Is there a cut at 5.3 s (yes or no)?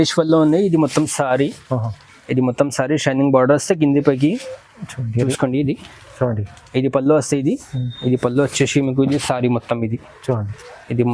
yes